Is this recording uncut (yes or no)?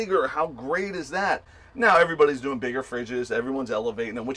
yes